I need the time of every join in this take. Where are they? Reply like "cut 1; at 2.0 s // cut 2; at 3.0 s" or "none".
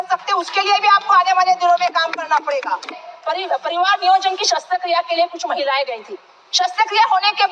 cut 1; at 3.1 s